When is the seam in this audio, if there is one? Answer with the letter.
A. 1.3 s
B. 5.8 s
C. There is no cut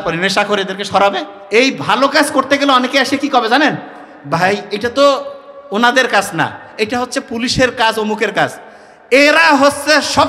A